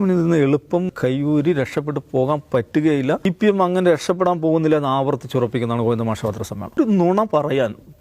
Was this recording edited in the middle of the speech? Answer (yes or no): yes